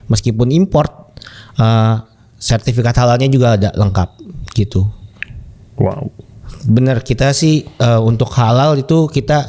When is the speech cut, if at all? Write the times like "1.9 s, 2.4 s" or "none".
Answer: none